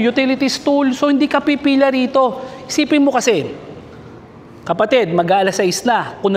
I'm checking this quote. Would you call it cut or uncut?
uncut